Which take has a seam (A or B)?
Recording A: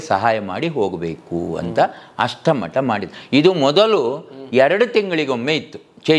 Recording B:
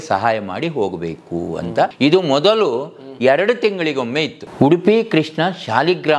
B